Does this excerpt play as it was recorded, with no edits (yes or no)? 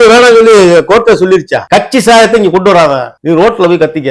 no